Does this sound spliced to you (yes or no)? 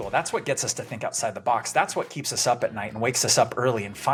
no